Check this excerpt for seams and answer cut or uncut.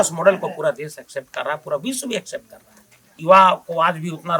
cut